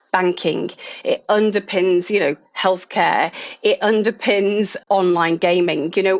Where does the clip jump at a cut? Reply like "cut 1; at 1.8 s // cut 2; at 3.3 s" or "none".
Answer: cut 1; at 4.8 s